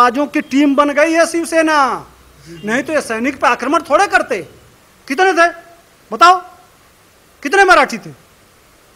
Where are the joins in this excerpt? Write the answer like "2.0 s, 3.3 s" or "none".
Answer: 4.5 s